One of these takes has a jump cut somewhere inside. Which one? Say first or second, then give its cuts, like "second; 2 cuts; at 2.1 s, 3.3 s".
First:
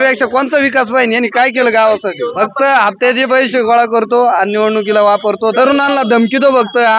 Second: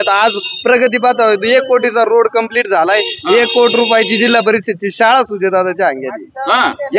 first; 2 cuts; at 2.3 s, 5.5 s